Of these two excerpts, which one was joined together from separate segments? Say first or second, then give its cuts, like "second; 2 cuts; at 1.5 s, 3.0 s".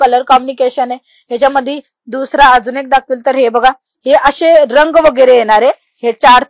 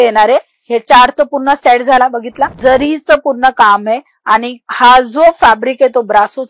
second; 1 cut; at 2.5 s